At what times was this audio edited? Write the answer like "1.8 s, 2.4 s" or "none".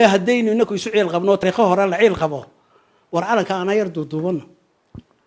1.4 s